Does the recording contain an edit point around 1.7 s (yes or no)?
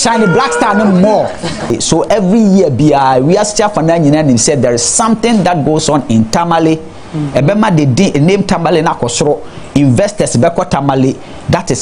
yes